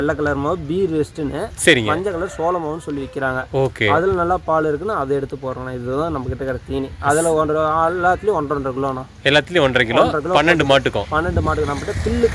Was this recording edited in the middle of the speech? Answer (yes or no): no